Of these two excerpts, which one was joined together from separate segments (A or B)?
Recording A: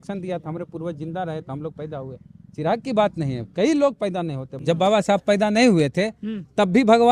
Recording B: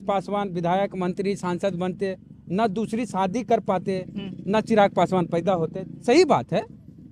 A